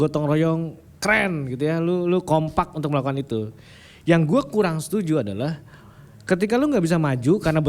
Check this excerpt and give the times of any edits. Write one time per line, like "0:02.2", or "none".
none